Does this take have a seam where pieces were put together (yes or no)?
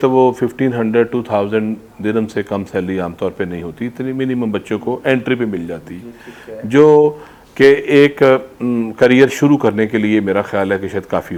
no